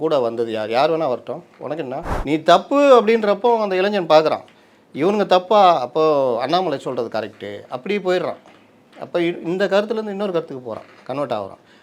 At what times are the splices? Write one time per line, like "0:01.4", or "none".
0:02.0